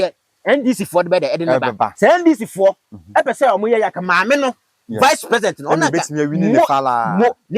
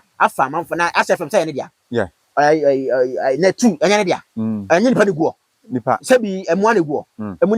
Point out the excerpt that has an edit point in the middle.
first; 1 cut; at 1.9 s

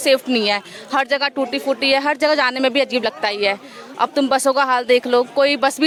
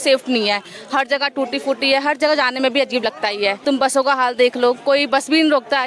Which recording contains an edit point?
second; 1 cut; at 3.6 s

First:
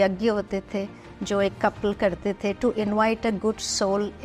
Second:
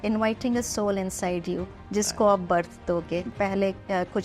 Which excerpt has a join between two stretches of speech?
second; 1 cut; at 3.3 s

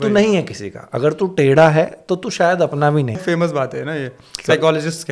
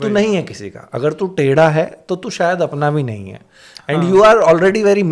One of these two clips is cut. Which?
first; 1 cut; at 3.2 s

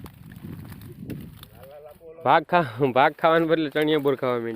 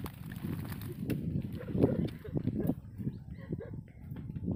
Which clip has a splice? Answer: first; 1 cut; at 1.3 s

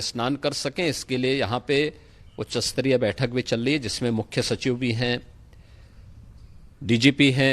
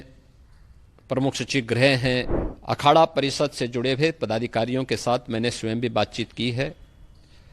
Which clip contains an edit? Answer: second; 1 cut; at 2.3 s

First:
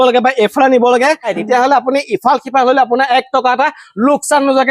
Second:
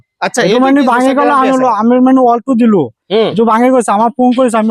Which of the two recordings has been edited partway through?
first; 1 cut; at 1.4 s

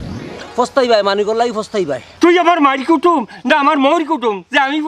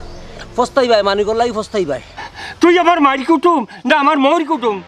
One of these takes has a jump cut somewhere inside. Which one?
first; 1 cut; at 2.0 s

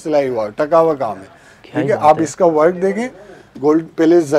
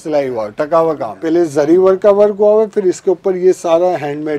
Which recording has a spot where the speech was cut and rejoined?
second; 1 cut; at 1.2 s

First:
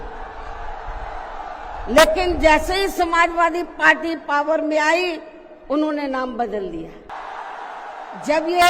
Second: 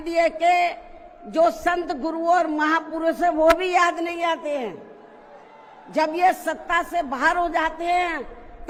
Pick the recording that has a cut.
first; 1 cut; at 7.1 s

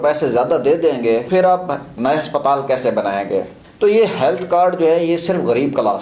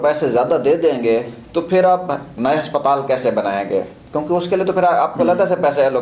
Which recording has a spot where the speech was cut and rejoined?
first; 2 cuts; at 1.3 s, 3.6 s

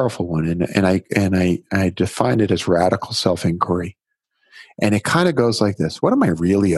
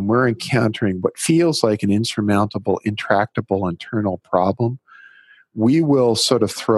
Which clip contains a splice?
second; 1 cut; at 1.2 s

